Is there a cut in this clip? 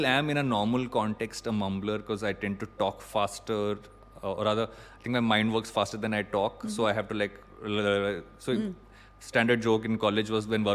no; 0 cuts

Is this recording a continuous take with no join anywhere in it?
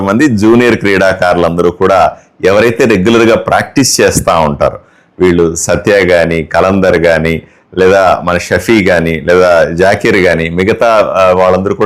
no; 1 cut; at 5.4 s

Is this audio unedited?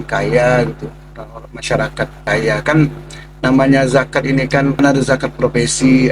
no; 1 cut; at 4.8 s

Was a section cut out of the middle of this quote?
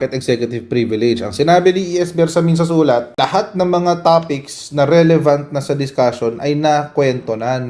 no; 0 cuts

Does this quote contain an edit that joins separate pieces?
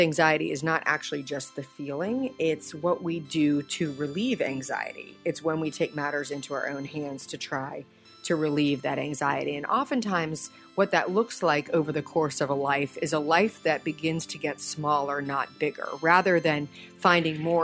no; 0 cuts

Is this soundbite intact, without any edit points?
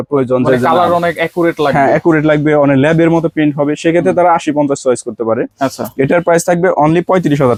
yes; 0 cuts

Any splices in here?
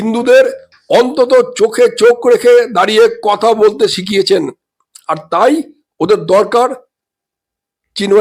no; 0 cuts

